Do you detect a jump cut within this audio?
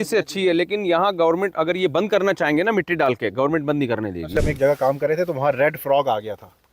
yes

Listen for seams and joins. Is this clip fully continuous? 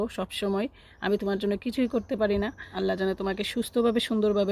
no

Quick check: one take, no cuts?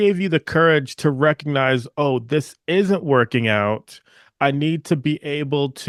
yes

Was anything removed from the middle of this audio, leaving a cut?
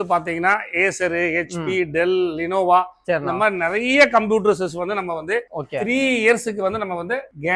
no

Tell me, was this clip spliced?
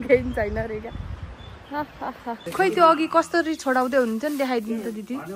yes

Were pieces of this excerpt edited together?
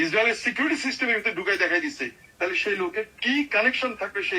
no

